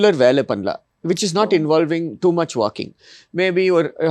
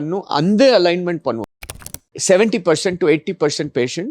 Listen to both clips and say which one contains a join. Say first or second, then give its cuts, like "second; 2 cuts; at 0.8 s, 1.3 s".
second; 1 cut; at 1.7 s